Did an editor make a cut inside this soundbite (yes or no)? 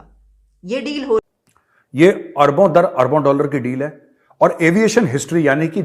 yes